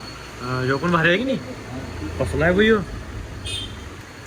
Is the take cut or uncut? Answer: uncut